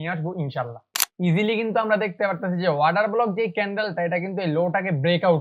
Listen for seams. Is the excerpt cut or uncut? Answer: cut